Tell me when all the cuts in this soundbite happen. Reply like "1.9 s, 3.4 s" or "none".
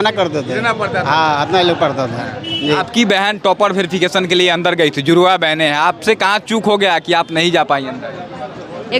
2.8 s